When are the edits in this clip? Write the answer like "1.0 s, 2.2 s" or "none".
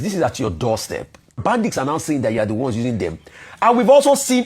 1.4 s